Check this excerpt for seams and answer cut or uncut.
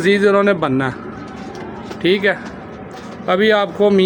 uncut